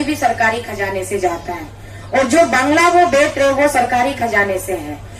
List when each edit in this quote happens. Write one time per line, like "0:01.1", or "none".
none